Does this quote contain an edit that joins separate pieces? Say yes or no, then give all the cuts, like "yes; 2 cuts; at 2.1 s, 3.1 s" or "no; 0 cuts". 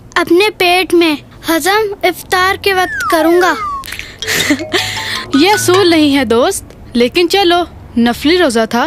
no; 0 cuts